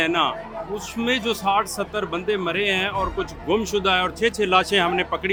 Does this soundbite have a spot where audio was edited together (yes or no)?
no